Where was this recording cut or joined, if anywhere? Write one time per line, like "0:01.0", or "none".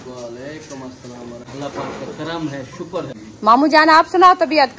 0:01.5
0:03.2

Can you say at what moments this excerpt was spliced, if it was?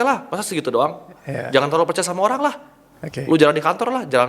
none

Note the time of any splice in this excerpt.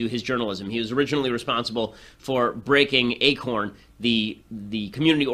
0:01.2

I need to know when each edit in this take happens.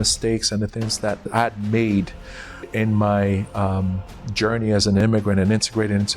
0:01.3
0:02.6
0:05.0

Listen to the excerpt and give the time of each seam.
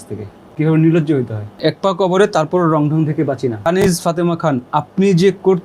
0:01.6
0:03.7

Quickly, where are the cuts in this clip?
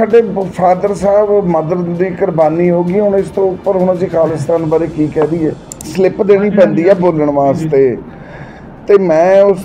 0:05.8

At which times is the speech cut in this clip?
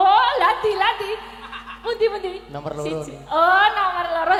none

